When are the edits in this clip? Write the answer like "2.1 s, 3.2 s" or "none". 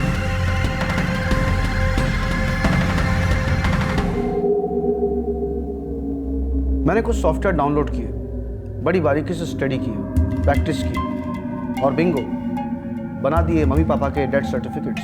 4.1 s